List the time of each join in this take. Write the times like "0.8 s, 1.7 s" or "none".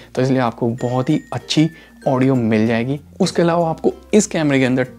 3.1 s